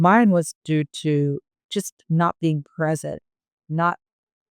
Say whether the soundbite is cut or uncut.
cut